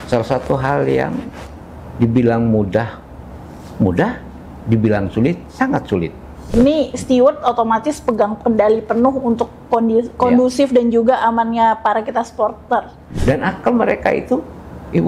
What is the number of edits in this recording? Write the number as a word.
two